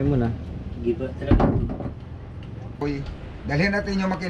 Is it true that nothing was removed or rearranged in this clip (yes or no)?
no